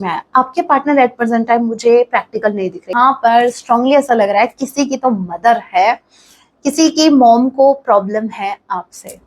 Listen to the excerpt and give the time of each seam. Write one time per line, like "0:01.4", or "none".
0:02.9